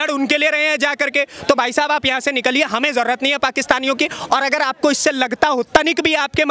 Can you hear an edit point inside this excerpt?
no; 0 cuts

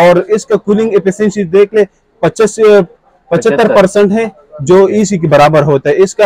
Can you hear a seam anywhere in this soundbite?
no; 0 cuts

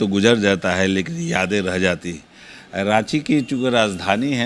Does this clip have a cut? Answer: no; 0 cuts

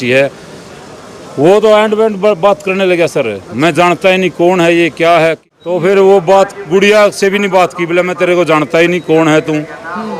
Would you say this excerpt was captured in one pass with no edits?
no; 1 cut; at 5.5 s

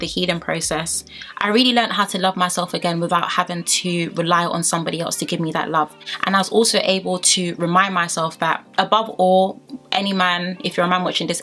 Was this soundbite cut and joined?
no; 0 cuts

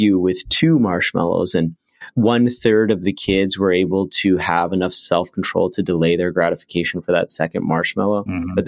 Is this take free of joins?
no; 1 cut; at 2.1 s

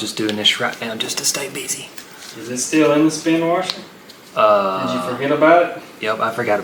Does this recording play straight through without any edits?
yes; 0 cuts

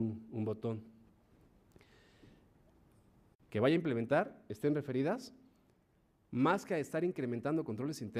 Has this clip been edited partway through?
no; 0 cuts

